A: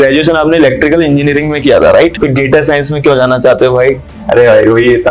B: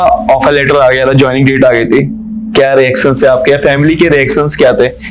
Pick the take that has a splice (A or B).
A